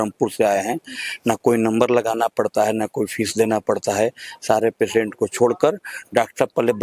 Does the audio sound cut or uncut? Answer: uncut